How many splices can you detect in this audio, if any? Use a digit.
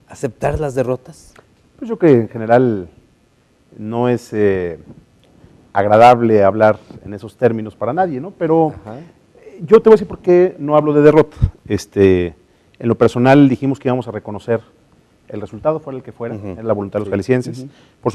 2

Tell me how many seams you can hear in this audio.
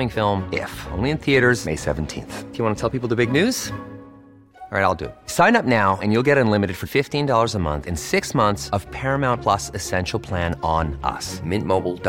0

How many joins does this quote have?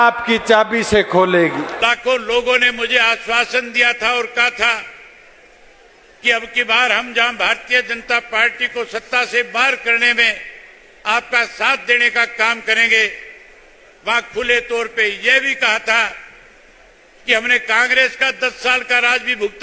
1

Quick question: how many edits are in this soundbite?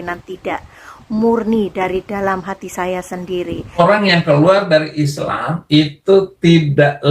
1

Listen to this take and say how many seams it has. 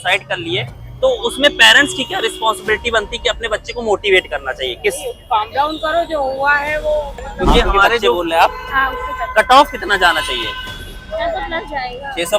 1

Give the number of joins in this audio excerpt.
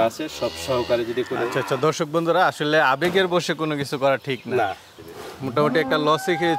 1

